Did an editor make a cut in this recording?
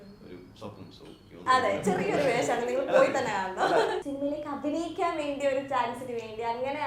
yes; 2 cuts; at 1.4 s, 4.0 s

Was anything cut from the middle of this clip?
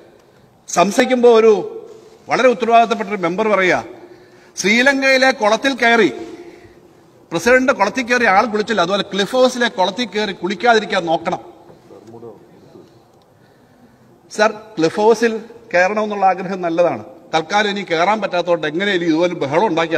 yes; 1 cut; at 1.0 s

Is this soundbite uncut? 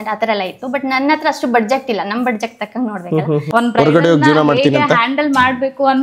no; 1 cut; at 3.5 s

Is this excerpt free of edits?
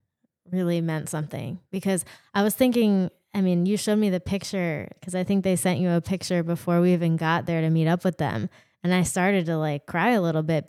yes; 0 cuts

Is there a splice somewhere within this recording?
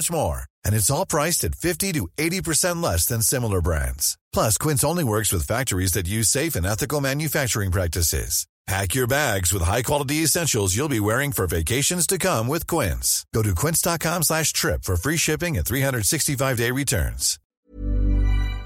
yes; 1 cut; at 17.6 s

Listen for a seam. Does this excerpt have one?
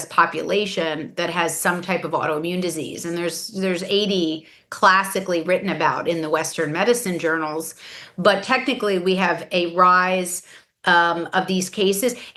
no; 0 cuts

